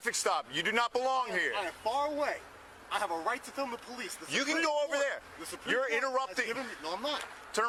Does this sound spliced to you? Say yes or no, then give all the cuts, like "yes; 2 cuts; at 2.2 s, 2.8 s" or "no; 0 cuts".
no; 0 cuts